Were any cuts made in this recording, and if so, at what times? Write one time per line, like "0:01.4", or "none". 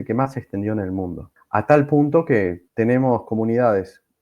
0:01.3
0:02.6